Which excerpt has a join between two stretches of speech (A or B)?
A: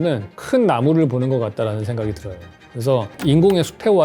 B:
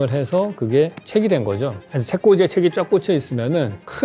B